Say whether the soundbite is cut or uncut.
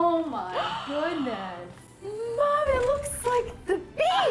uncut